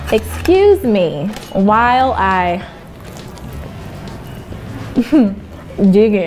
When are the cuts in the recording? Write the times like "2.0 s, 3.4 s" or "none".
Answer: none